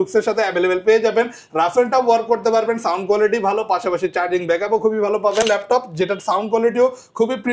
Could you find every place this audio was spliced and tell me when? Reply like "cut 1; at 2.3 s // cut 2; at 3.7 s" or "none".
cut 1; at 5.4 s